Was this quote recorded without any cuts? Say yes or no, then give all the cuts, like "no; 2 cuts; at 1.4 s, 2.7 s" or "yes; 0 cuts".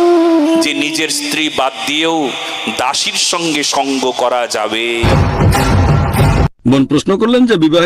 no; 2 cuts; at 5.1 s, 6.5 s